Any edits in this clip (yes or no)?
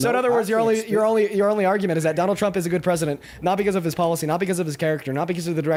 no